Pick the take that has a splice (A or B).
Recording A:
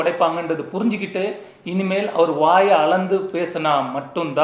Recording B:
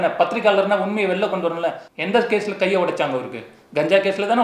B